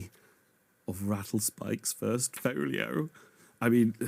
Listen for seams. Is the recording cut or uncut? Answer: uncut